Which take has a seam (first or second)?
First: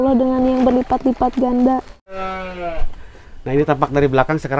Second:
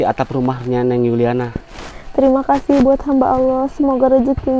first